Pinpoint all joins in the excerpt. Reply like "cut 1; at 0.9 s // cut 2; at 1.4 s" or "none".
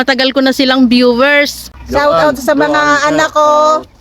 cut 1; at 1.6 s